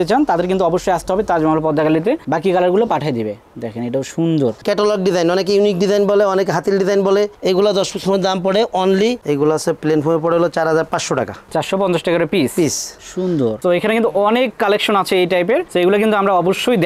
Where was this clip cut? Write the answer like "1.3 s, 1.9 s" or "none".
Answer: 2.2 s, 4.6 s, 9.2 s, 13.6 s